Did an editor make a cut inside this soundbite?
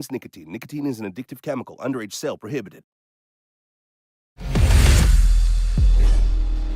yes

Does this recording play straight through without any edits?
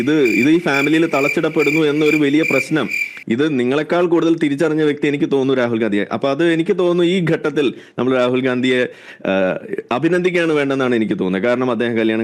yes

